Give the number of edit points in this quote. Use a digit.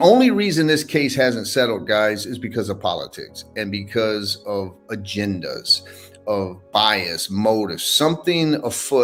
0